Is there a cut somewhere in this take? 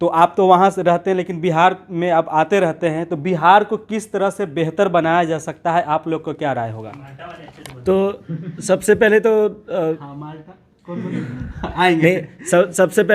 no; 0 cuts

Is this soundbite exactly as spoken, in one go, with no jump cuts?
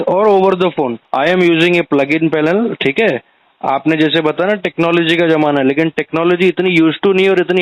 no; 1 cut; at 1.0 s

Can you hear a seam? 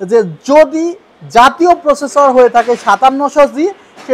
no; 0 cuts

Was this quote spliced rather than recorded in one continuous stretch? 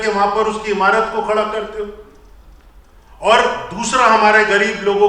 no; 0 cuts

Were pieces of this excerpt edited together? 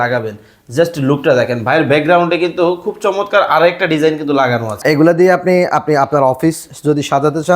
yes; 1 cut; at 4.8 s

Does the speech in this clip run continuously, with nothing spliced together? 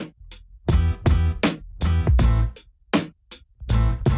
yes; 0 cuts

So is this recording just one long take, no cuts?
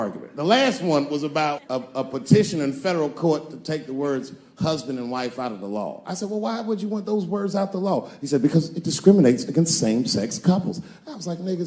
no; 1 cut; at 1.7 s

